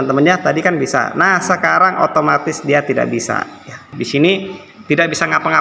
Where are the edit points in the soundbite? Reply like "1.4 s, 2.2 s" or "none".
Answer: 3.9 s